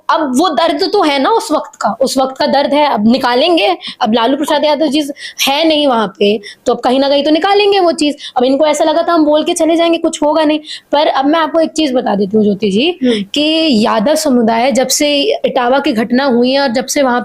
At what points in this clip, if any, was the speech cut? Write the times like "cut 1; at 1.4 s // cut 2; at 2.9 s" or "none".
none